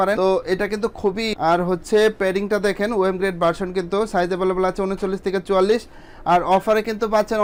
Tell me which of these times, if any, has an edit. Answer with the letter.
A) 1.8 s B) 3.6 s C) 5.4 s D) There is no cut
D